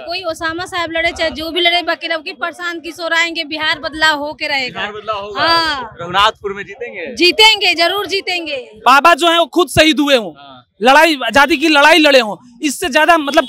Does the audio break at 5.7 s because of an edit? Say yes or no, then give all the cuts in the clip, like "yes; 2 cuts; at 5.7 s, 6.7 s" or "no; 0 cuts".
no; 1 cut; at 8.8 s